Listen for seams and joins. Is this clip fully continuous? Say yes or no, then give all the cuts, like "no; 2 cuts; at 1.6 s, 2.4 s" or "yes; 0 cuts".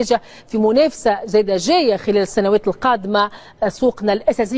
yes; 0 cuts